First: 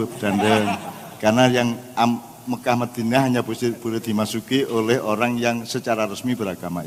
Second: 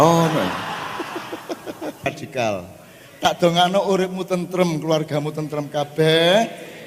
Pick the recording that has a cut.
second; 1 cut; at 2.1 s

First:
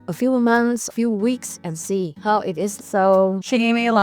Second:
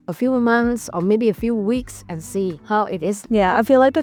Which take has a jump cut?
first; 2 cuts; at 0.9 s, 2.8 s

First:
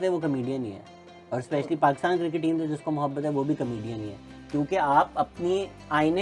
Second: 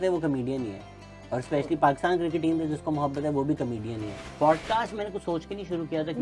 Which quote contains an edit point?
second; 1 cut; at 4.2 s

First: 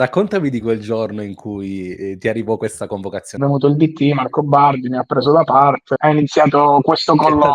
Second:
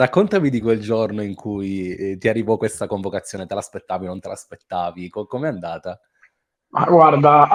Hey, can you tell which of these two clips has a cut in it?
first; 2 cuts; at 3.4 s, 5.9 s

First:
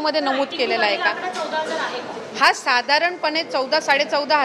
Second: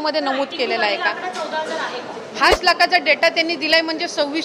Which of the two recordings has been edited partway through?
second; 1 cut; at 2.6 s

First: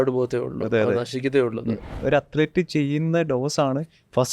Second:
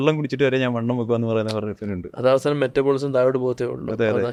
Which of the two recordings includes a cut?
first; 1 cut; at 2.0 s

